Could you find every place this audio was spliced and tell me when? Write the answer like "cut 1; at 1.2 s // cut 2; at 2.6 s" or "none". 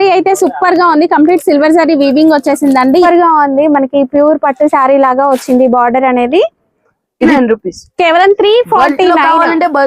cut 1; at 3.1 s // cut 2; at 7.3 s